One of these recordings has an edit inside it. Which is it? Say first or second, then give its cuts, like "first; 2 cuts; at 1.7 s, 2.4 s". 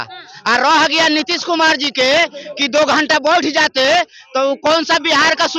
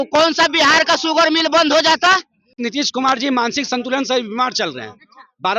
second; 1 cut; at 2.5 s